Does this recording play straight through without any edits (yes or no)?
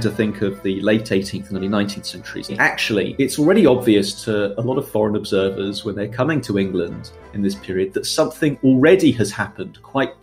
no